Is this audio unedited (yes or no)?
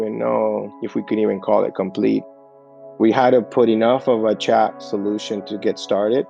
no